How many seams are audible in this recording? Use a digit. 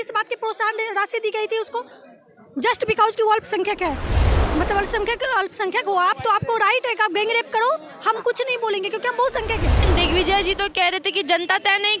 1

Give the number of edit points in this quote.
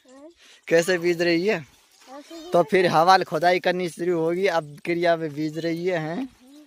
0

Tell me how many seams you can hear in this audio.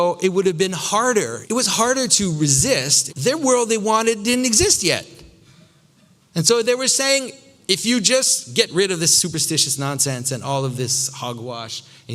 2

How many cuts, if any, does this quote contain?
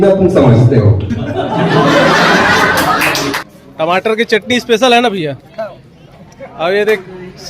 1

